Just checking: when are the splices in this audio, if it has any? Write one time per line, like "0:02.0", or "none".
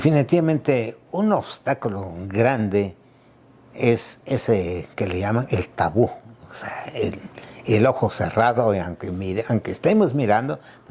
none